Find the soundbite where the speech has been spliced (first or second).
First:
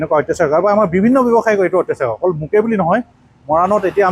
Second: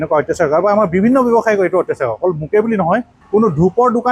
second